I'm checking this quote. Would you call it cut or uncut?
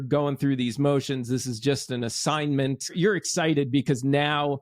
cut